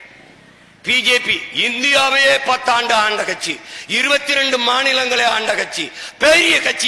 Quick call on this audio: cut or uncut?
uncut